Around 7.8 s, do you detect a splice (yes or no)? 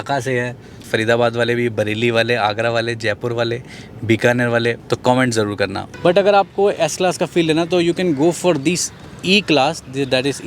no